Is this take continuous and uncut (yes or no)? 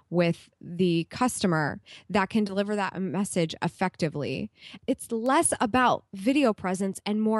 no